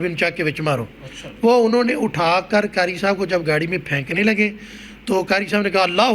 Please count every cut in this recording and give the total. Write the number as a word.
zero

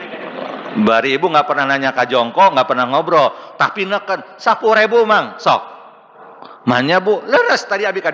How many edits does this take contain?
zero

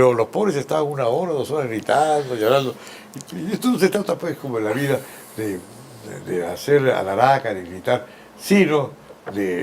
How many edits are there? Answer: one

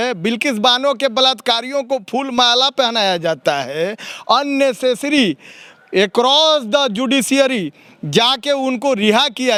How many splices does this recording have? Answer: zero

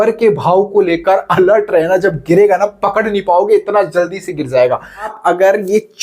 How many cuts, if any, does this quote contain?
one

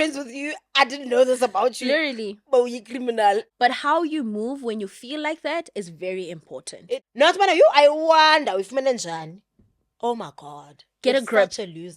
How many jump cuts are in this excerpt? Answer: two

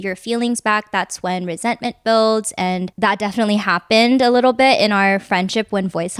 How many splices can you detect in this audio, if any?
zero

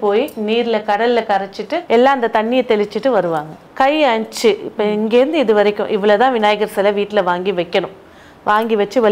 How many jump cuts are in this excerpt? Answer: two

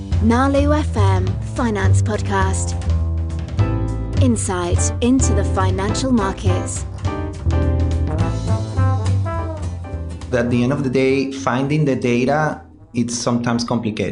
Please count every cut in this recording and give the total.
two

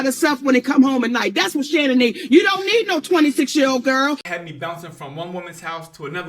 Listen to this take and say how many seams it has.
one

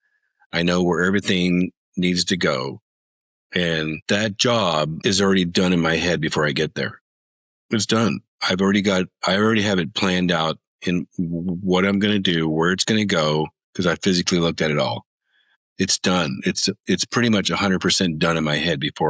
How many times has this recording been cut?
zero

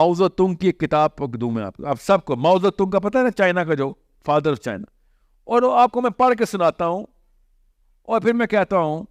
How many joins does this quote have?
zero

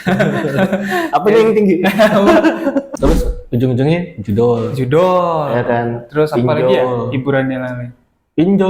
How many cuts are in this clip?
one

